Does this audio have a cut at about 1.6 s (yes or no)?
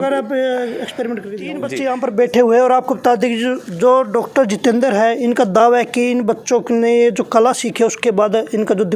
yes